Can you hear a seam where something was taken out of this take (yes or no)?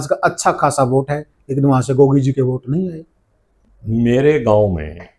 no